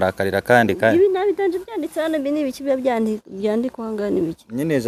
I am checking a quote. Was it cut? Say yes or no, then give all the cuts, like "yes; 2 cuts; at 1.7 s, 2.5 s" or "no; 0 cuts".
no; 0 cuts